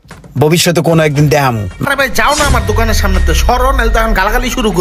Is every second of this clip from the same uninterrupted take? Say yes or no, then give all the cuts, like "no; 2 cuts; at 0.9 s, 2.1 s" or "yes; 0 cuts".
no; 1 cut; at 1.8 s